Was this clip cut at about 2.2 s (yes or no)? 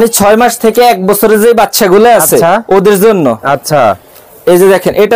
no